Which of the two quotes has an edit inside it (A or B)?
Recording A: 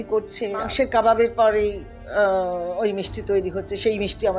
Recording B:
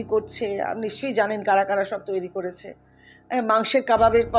A